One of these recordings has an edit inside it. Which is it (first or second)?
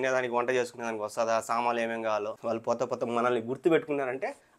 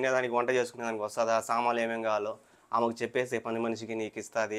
first